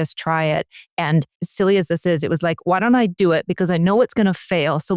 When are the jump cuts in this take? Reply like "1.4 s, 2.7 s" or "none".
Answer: 1.4 s